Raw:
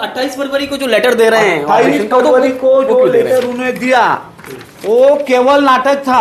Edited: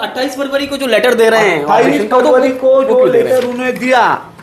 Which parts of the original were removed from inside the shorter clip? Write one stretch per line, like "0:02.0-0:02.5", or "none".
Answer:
none